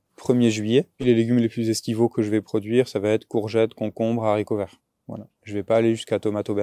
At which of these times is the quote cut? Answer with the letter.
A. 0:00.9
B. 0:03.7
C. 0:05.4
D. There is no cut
A